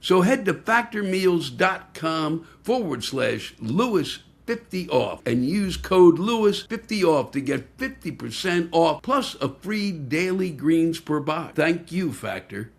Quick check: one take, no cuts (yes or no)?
no